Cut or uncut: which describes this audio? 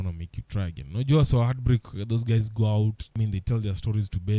cut